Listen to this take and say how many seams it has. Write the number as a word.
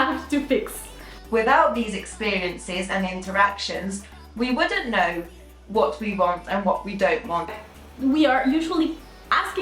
two